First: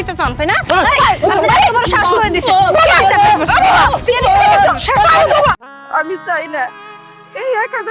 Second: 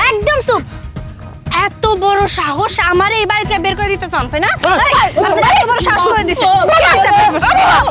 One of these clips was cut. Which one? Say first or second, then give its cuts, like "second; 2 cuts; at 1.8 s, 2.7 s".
first; 1 cut; at 5.6 s